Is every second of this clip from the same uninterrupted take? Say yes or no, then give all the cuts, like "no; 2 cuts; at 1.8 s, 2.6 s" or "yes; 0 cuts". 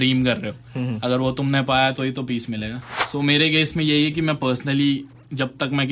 no; 1 cut; at 2.9 s